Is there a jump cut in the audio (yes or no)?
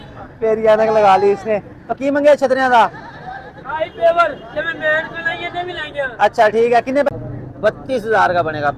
yes